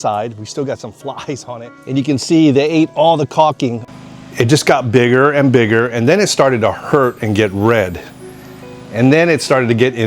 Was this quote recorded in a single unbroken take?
no; 2 cuts; at 1.9 s, 3.8 s

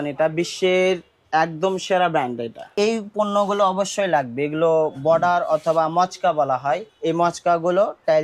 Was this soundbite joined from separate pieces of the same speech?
yes; 2 cuts; at 2.7 s, 6.9 s

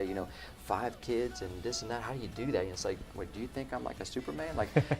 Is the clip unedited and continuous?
yes; 0 cuts

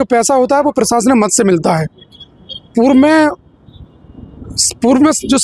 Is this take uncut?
yes; 0 cuts

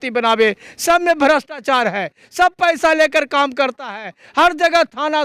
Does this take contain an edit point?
no; 0 cuts

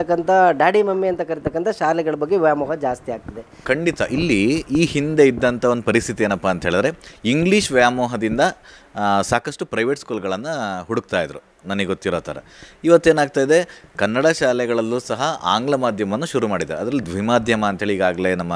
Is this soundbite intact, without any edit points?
no; 1 cut; at 3.5 s

